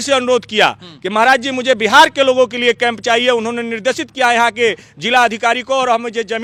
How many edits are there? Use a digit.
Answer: 0